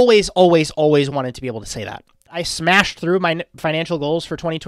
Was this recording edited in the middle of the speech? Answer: yes; 1 cut; at 2.5 s

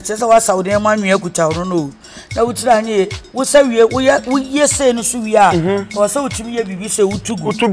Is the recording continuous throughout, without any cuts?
yes; 0 cuts

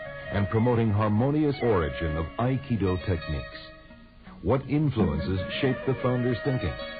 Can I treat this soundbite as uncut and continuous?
yes; 0 cuts

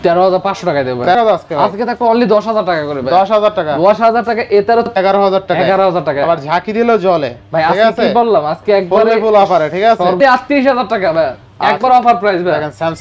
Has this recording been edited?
yes; 3 cuts; at 1.1 s, 4.9 s, 10.2 s

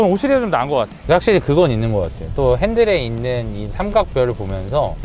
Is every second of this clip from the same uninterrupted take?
no; 2 cuts; at 0.9 s, 2.2 s

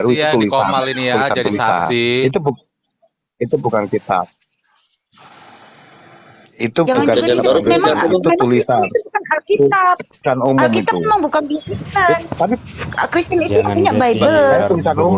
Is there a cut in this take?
no; 0 cuts

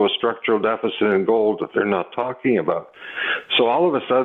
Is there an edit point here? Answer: no; 0 cuts

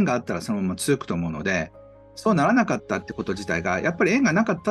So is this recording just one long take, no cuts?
yes; 0 cuts

